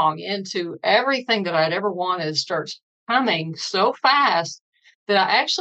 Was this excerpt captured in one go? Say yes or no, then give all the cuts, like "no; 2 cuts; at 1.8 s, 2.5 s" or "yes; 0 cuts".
yes; 0 cuts